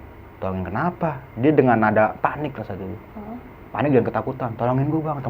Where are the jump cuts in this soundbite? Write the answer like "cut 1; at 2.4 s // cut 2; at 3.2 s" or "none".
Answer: none